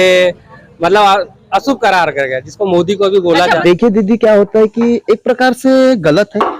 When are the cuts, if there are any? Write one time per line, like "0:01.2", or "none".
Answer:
0:03.5